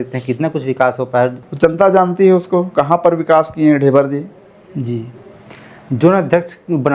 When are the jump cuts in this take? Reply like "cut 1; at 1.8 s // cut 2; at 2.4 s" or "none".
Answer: cut 1; at 1.4 s